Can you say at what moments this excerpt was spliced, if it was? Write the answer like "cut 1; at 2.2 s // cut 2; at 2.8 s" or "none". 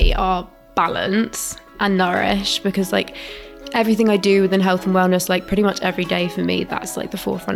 none